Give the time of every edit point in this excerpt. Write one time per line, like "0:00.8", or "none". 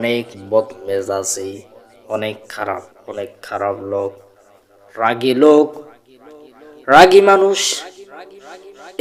none